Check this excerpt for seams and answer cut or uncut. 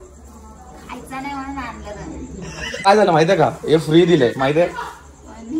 cut